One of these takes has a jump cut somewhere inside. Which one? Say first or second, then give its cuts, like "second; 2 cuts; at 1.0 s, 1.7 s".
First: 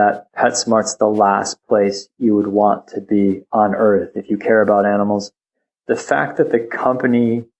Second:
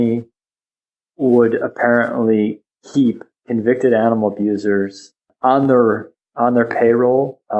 second; 1 cut; at 5.3 s